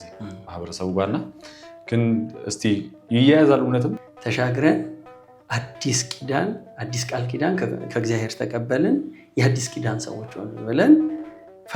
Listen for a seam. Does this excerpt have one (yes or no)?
yes